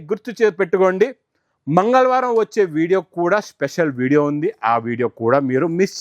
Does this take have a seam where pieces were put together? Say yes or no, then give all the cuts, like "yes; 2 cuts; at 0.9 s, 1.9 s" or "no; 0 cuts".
no; 0 cuts